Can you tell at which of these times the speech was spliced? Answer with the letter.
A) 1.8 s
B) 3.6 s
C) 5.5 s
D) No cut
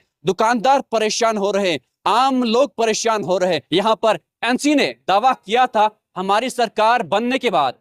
B